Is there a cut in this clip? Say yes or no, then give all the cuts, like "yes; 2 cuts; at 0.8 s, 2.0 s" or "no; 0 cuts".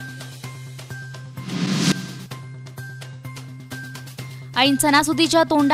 no; 0 cuts